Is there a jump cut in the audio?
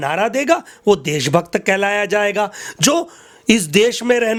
no; 0 cuts

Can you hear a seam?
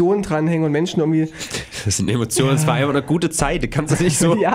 no; 0 cuts

